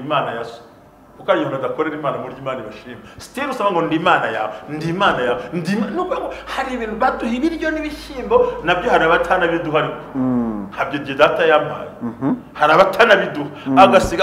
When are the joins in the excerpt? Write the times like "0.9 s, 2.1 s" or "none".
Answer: none

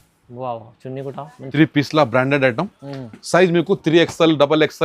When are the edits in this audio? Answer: 1.3 s

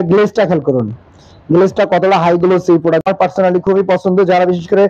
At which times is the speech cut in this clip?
3.0 s

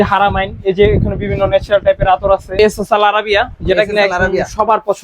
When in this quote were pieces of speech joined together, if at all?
2.6 s

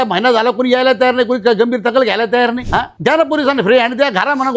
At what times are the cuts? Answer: none

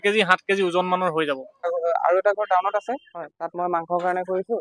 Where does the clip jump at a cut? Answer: 1.7 s

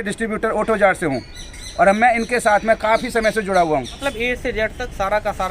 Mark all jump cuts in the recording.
3.9 s

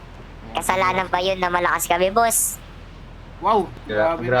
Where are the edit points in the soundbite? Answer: 2.9 s

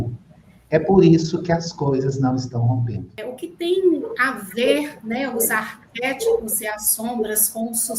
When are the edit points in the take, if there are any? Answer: 3.2 s

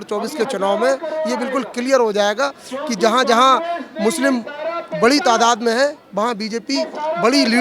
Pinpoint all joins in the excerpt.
none

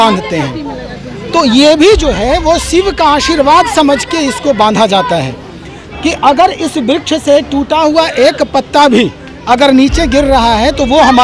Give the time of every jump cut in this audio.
none

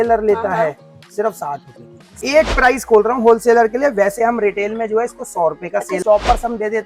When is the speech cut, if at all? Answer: 2.2 s, 6.0 s

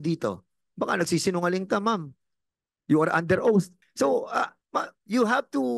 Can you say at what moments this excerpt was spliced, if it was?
3.8 s

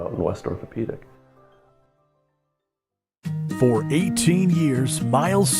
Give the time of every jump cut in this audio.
3.3 s

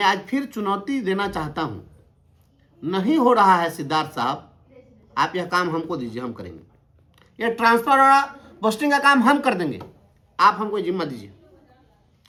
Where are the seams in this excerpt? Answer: none

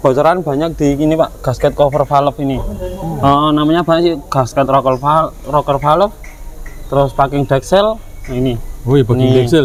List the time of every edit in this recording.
none

